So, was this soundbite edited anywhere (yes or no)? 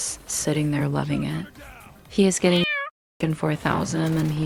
no